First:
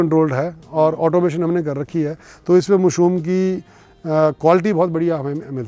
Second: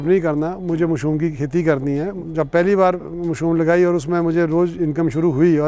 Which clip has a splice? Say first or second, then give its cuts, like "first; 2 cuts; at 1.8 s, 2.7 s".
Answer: second; 1 cut; at 2.2 s